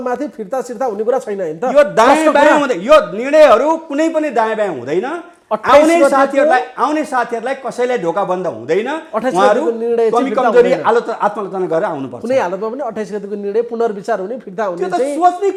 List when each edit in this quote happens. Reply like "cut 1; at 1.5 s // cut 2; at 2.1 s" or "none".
none